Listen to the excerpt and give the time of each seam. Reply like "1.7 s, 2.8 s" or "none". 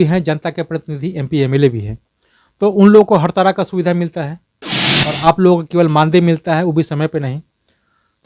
none